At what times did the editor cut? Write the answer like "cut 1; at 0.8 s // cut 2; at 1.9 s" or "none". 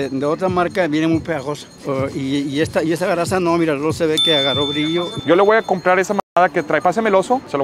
cut 1; at 5.1 s